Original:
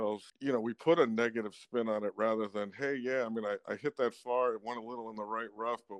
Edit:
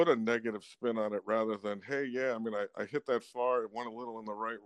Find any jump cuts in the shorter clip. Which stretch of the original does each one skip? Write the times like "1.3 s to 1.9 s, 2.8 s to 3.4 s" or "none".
none